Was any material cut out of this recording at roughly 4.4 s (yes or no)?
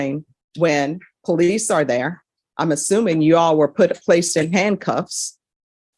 no